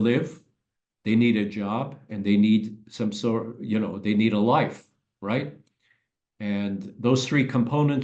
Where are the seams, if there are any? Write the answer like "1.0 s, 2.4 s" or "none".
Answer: none